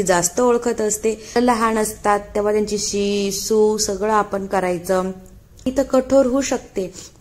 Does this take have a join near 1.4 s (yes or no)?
yes